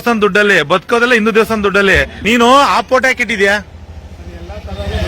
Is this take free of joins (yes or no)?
no